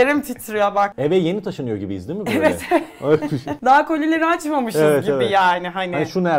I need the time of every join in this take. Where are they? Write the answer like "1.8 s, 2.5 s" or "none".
0.9 s, 3.5 s